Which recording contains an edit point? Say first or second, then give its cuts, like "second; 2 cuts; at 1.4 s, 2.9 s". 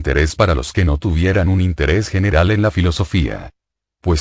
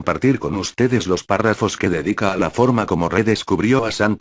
second; 1 cut; at 1.8 s